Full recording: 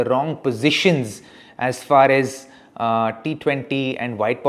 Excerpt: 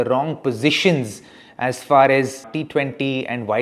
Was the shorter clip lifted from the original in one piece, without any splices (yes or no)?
no